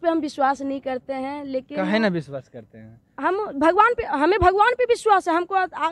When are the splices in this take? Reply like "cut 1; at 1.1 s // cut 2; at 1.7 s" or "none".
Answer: none